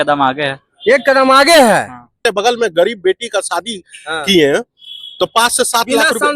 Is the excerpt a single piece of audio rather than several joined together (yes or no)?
no